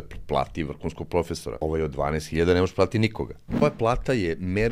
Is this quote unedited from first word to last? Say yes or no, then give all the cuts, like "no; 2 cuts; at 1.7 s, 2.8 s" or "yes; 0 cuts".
no; 2 cuts; at 1.6 s, 3.6 s